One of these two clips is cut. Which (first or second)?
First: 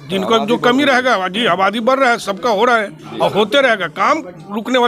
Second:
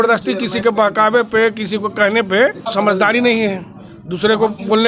second